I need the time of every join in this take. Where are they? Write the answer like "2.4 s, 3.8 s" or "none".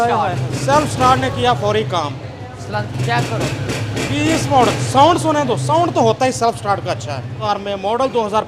7.4 s